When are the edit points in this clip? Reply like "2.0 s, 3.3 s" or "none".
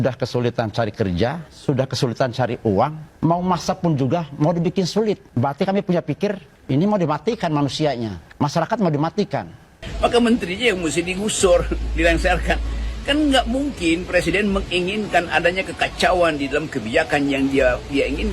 1.5 s, 3.0 s, 5.3 s, 6.5 s, 8.2 s, 9.8 s